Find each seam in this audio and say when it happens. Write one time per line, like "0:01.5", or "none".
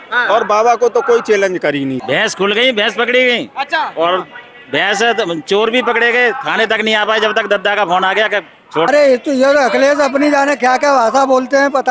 0:02.0
0:08.9